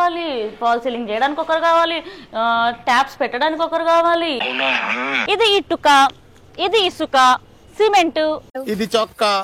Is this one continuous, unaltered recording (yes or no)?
no